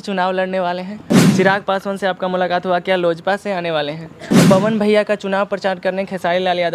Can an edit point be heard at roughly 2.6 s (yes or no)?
no